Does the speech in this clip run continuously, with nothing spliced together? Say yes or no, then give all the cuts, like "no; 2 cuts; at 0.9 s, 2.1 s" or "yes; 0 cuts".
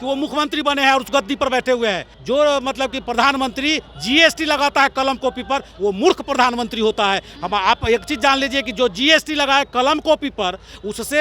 no; 1 cut; at 2.1 s